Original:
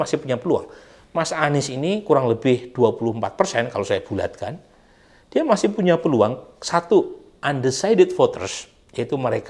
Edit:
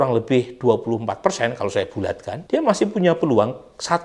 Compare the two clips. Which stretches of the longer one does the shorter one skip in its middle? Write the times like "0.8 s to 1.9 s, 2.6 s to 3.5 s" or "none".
4.5 s to 5.2 s